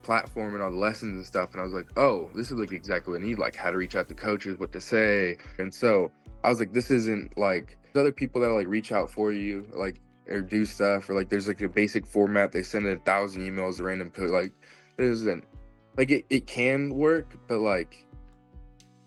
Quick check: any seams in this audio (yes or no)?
no